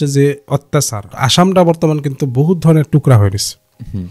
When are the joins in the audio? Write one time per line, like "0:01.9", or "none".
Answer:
0:01.1

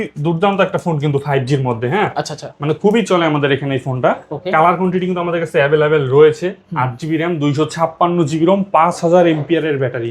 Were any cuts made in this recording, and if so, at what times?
none

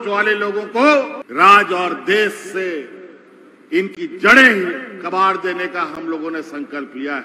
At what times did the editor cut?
0:01.2

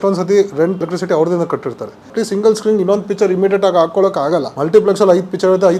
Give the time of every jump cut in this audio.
0:00.8
0:02.0
0:04.5

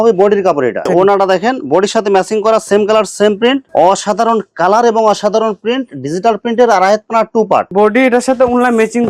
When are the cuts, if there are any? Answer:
0:00.8
0:03.7
0:07.7

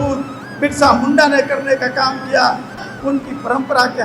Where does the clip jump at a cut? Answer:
0:02.8

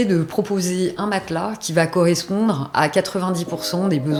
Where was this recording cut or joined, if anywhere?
none

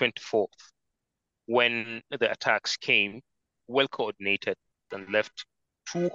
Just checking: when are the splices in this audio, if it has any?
0:03.6
0:04.9

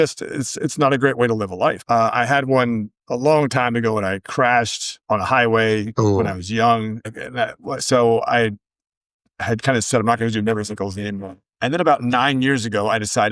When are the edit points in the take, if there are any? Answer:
0:01.8

